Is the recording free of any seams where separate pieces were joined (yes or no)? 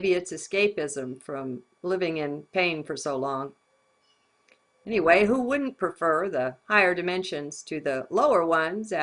no